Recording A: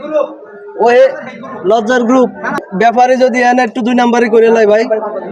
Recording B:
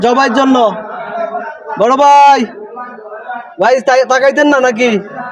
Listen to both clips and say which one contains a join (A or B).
A